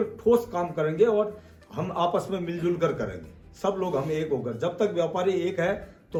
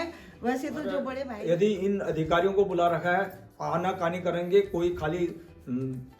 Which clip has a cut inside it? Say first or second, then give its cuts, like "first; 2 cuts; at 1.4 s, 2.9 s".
second; 1 cut; at 1.2 s